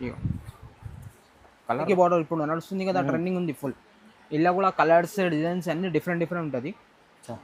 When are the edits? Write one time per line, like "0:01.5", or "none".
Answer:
0:01.9

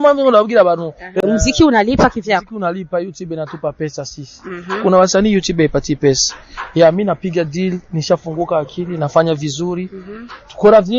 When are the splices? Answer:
0:01.2

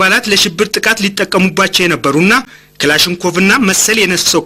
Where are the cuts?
0:02.5

